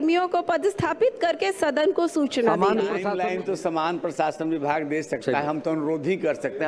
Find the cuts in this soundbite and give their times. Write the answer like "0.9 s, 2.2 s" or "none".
3.1 s